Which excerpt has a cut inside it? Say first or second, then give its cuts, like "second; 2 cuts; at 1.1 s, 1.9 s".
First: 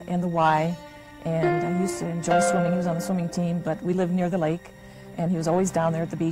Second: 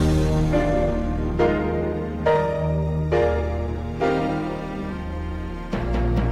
first; 1 cut; at 1.6 s